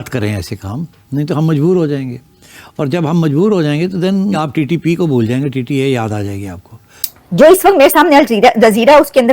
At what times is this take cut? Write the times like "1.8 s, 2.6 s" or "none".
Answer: 7.1 s